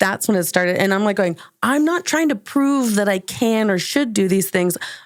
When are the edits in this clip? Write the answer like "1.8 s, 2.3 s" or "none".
none